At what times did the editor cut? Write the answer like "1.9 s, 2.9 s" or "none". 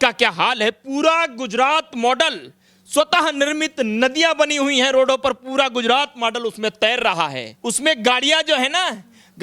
7.5 s